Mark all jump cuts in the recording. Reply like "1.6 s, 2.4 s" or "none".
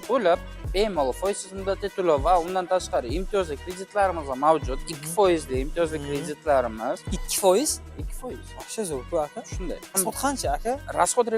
10.0 s